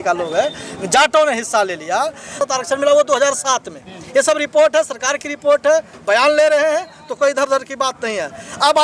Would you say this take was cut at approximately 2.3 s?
yes; 1 cut; at 2.3 s

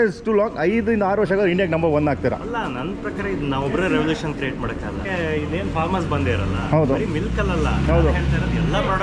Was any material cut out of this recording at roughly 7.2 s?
no; 1 cut; at 5.0 s

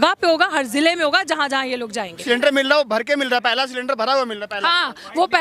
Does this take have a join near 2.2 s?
yes; 1 cut; at 2.2 s

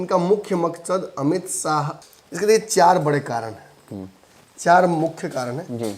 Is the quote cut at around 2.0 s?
yes; 1 cut; at 2.0 s

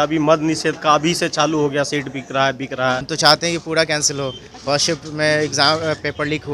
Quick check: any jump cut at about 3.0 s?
yes; 1 cut; at 3.0 s

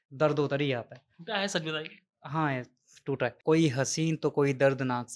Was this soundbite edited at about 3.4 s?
yes; 1 cut; at 3.4 s

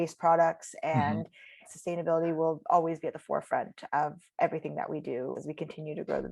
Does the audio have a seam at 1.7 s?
yes; 2 cuts; at 1.7 s, 5.3 s

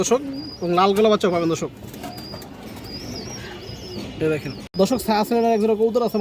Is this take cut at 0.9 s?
no; 1 cut; at 4.6 s

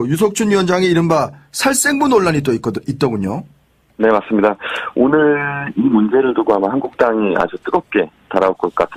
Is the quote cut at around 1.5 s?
no; 0 cuts

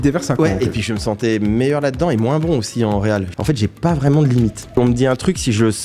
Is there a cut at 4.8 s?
yes; 2 cuts; at 3.3 s, 4.8 s

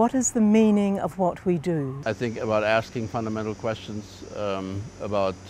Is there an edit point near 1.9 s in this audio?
yes; 1 cut; at 1.9 s

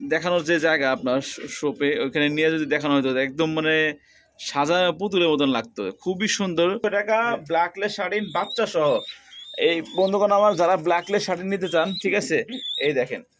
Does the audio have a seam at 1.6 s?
no; 1 cut; at 6.8 s

